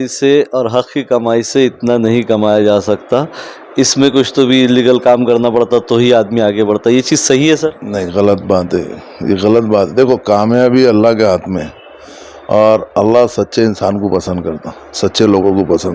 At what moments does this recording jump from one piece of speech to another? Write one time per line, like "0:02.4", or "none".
none